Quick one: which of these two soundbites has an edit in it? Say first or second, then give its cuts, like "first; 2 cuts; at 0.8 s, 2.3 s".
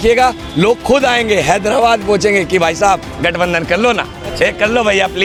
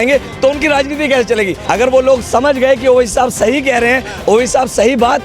second; 1 cut; at 1.6 s